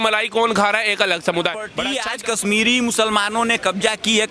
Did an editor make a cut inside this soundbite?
yes; 1 cut; at 1.8 s

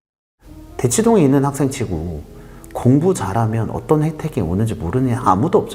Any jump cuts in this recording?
no; 0 cuts

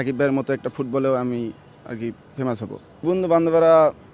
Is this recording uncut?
no; 1 cut; at 3.0 s

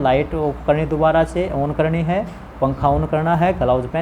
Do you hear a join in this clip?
no; 0 cuts

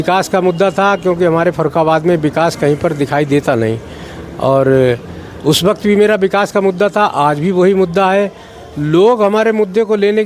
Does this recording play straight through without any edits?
yes; 0 cuts

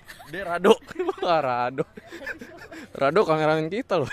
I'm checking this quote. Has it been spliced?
no; 0 cuts

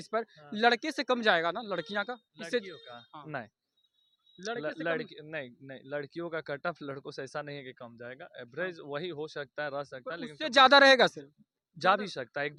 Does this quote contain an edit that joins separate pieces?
no; 0 cuts

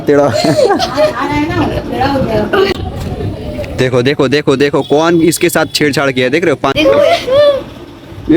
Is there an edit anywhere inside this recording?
yes; 2 cuts; at 2.8 s, 6.7 s

